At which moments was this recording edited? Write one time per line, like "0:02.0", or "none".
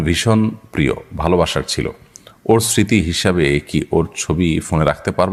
none